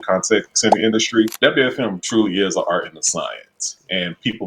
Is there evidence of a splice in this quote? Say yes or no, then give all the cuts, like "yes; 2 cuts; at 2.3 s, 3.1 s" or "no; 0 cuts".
no; 0 cuts